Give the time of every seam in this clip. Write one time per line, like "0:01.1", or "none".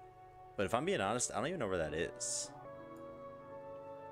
0:02.7